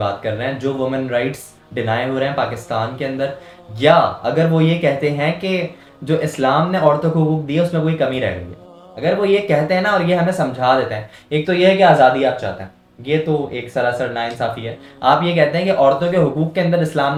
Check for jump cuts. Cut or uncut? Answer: uncut